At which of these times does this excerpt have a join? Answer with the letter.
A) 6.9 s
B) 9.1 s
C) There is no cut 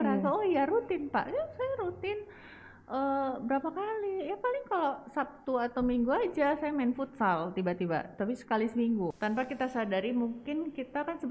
B